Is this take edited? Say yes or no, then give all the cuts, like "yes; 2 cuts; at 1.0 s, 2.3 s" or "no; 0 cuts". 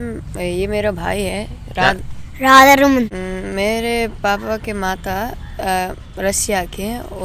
yes; 1 cut; at 3.1 s